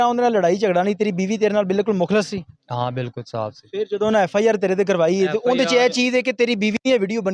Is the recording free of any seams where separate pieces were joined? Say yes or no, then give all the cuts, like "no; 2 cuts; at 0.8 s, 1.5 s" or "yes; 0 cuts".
yes; 0 cuts